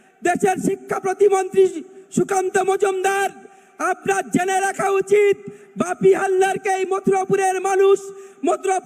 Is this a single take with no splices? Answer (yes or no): yes